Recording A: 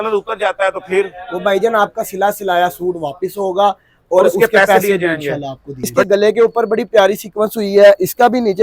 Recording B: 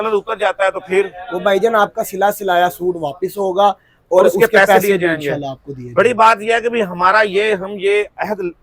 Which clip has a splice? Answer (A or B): A